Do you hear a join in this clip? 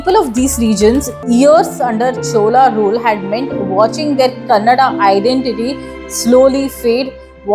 no; 0 cuts

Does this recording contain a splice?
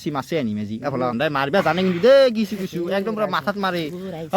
yes; 1 cut; at 1.1 s

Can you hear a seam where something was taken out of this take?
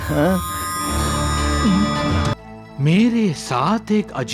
yes; 1 cut; at 2.3 s

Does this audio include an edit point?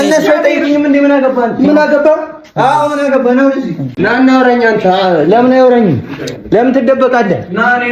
yes; 1 cut; at 3.9 s

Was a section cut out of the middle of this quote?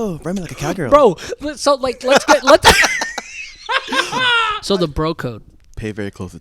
yes; 1 cut; at 4.6 s

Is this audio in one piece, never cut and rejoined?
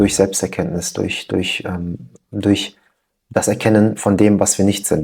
yes; 0 cuts

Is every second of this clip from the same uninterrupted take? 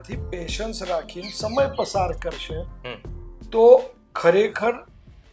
yes; 0 cuts

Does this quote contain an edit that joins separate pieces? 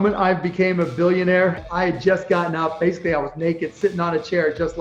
yes; 1 cut; at 1.7 s

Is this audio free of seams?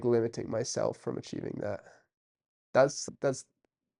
no; 1 cut; at 3.0 s

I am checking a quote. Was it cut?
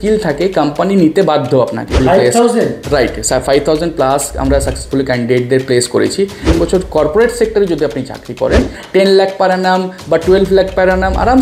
yes; 2 cuts; at 1.9 s, 6.4 s

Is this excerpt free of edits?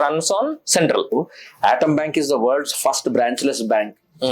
no; 1 cut; at 1.1 s

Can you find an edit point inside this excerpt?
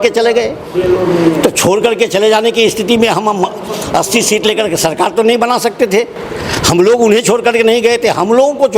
no; 0 cuts

